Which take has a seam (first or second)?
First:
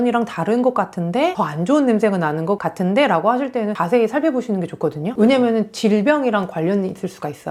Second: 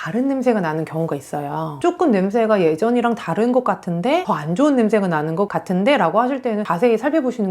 second